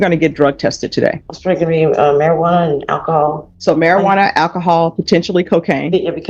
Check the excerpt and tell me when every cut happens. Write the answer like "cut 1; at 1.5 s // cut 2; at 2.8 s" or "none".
cut 1; at 1.3 s // cut 2; at 3.5 s

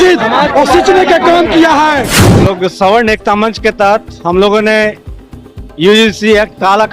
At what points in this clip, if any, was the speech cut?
cut 1; at 2.1 s

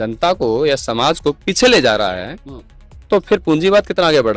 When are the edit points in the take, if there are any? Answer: none

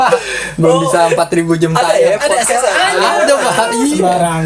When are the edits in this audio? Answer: none

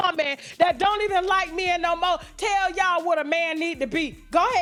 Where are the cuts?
none

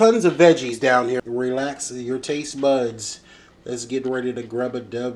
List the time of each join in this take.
cut 1; at 1.2 s

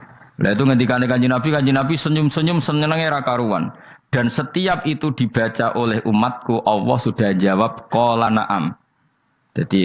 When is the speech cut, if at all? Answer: none

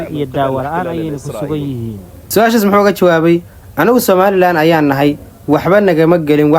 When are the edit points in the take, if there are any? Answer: none

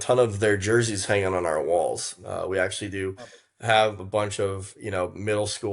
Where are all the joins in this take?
none

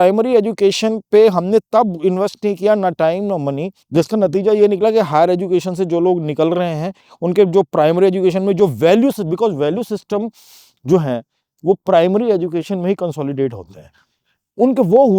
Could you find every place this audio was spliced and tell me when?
cut 1; at 3.7 s

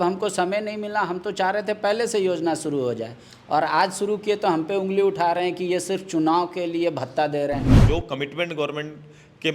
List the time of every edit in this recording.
cut 1; at 7.8 s

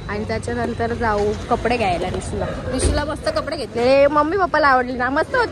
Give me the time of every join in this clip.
none

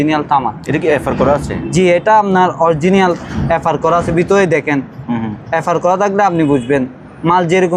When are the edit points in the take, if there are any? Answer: none

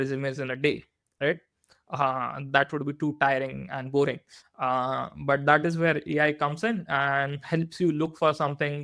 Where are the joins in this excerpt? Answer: none

